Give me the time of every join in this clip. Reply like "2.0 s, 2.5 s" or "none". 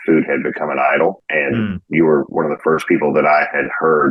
none